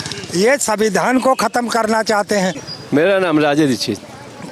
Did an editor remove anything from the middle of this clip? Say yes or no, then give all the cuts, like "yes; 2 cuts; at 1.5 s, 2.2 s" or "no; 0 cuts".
no; 0 cuts